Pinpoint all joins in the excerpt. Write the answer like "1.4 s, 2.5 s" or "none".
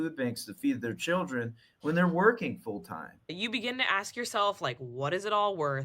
3.4 s